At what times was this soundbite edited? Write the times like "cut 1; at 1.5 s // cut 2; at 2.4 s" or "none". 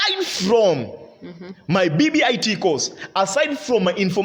none